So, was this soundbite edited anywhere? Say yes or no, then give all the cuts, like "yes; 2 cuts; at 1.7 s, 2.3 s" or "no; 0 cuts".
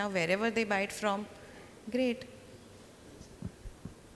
no; 0 cuts